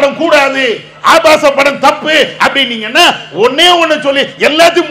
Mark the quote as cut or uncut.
uncut